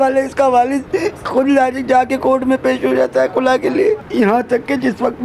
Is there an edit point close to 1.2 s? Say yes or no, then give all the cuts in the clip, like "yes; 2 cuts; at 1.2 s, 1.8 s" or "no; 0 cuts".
yes; 2 cuts; at 1.2 s, 4.1 s